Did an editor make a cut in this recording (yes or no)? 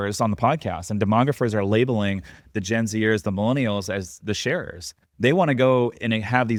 no